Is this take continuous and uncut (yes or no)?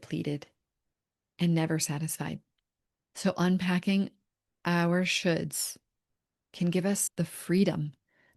no